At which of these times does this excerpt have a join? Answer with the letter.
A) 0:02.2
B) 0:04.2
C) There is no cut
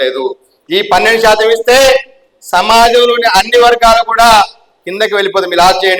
C